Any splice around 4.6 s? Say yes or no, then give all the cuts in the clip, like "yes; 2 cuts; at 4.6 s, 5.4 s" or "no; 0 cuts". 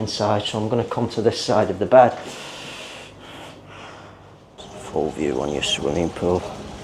yes; 1 cut; at 4.6 s